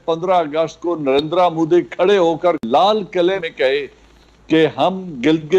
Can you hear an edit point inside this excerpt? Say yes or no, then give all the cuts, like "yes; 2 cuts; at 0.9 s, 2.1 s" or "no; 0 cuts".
yes; 2 cuts; at 2.6 s, 3.4 s